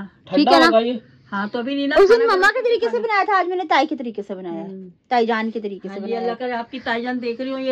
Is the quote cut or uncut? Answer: uncut